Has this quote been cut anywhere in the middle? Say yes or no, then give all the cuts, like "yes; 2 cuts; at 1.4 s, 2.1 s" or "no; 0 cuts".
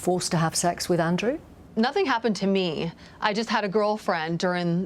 yes; 1 cut; at 1.5 s